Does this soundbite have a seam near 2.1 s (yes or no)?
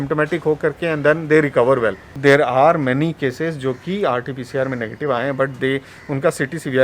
yes